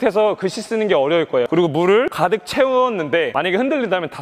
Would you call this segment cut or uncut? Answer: cut